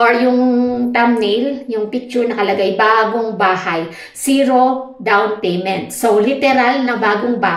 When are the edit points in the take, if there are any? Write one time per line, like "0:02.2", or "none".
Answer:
none